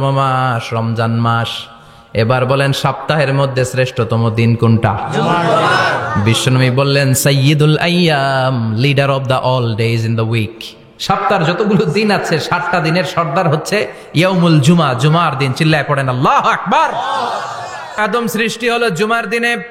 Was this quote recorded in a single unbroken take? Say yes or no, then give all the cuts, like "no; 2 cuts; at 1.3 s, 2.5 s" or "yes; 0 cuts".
no; 1 cut; at 18.0 s